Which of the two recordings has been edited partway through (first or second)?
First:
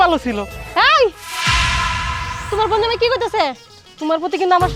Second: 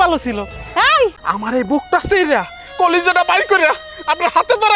second